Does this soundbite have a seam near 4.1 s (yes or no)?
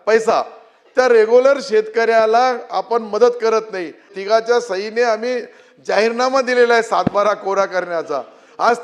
yes